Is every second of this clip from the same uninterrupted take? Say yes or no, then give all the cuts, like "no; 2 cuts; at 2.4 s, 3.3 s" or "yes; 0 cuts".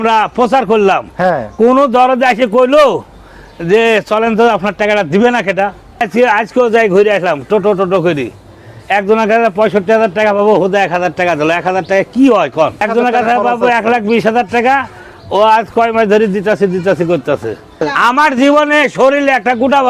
no; 3 cuts; at 6.0 s, 12.9 s, 17.9 s